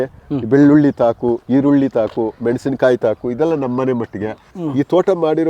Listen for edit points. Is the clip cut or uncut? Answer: cut